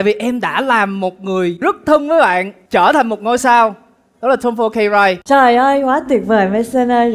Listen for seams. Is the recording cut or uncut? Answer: cut